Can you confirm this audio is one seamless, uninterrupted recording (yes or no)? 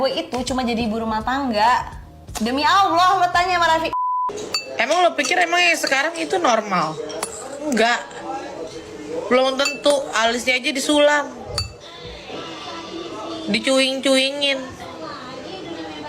no